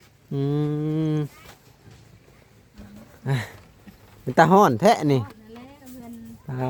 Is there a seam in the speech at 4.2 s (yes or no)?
no